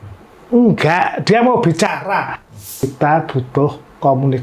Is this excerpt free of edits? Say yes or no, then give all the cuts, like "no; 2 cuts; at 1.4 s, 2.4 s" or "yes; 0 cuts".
no; 1 cut; at 2.9 s